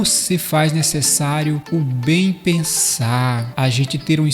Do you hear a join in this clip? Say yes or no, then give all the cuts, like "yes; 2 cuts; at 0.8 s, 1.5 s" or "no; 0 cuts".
yes; 2 cuts; at 1.6 s, 3.5 s